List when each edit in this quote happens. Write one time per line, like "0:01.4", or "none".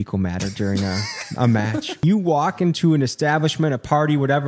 0:02.0